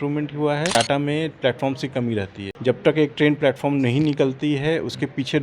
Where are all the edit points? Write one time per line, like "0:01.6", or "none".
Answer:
0:00.7
0:02.4